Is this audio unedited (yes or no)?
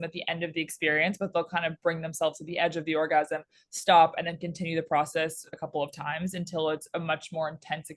yes